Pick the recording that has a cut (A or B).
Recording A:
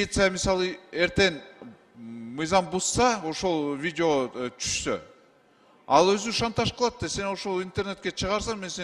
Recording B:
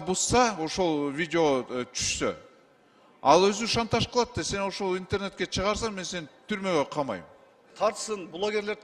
B